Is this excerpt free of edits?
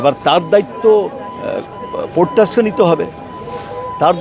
yes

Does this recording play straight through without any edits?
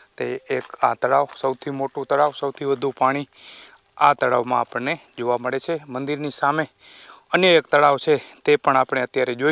yes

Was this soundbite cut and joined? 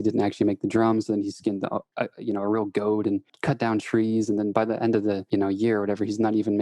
yes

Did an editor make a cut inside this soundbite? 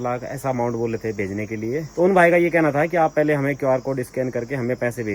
no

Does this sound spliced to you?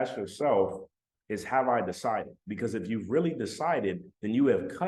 no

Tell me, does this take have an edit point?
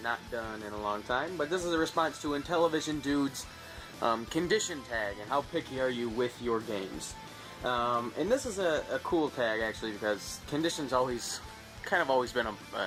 no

